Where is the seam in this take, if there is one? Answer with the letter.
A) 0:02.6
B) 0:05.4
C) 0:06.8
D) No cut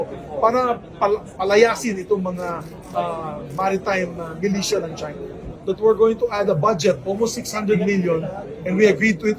B